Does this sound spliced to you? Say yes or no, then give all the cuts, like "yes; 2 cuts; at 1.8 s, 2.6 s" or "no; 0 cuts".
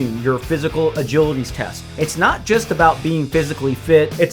yes; 1 cut; at 1.9 s